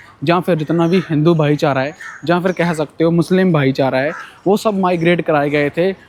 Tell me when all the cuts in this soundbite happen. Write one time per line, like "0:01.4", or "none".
none